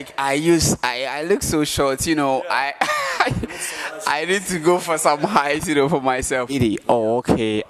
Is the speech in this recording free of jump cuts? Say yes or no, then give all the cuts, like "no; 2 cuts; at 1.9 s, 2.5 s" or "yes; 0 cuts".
no; 1 cut; at 6.5 s